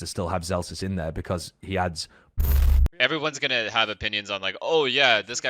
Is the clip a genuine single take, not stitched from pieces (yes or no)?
no